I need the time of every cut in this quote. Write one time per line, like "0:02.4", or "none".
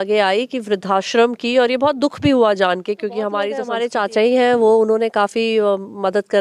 0:03.6